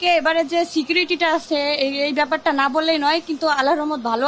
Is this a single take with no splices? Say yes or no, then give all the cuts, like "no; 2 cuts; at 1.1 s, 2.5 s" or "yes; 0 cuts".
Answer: yes; 0 cuts